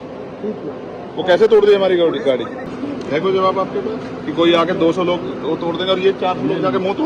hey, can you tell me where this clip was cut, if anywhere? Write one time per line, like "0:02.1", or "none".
0:02.6